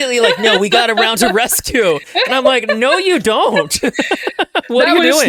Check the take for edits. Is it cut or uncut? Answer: uncut